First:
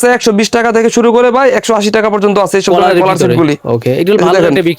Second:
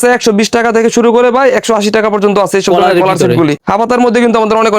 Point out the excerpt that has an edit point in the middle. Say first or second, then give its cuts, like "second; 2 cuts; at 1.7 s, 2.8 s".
second; 1 cut; at 3.6 s